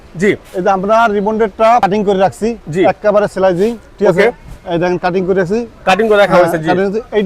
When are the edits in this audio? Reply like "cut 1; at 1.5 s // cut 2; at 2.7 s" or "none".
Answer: cut 1; at 1.8 s